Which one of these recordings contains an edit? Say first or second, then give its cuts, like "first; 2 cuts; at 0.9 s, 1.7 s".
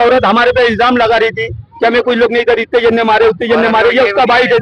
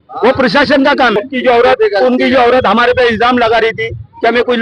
second; 1 cut; at 1.1 s